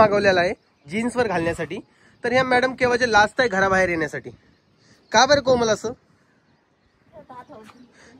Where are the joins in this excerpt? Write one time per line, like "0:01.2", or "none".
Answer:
none